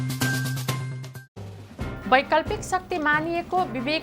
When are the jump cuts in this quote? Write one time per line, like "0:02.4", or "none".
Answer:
0:01.0